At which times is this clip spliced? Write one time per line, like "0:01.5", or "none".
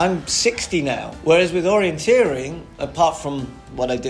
0:01.1
0:02.8